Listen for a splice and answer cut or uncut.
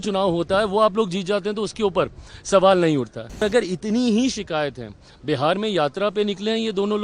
cut